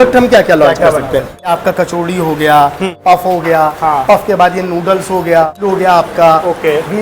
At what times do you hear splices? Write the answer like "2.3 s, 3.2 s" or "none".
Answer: 1.3 s, 2.9 s, 5.5 s